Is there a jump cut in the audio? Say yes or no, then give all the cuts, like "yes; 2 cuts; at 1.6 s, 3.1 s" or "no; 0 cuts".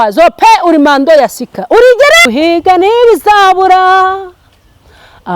yes; 1 cut; at 2.3 s